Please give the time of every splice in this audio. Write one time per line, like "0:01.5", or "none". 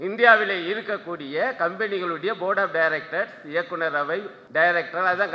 0:04.4